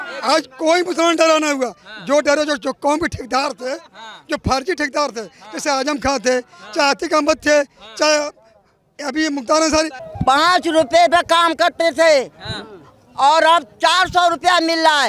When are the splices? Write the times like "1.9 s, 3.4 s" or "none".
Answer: 10.0 s